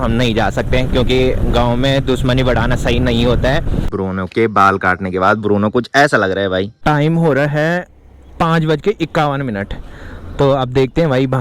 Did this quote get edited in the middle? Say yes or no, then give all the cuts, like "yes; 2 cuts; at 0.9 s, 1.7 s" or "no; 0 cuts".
yes; 2 cuts; at 3.9 s, 6.7 s